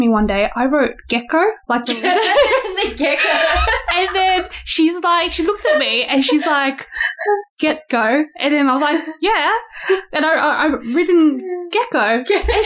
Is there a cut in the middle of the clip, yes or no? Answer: no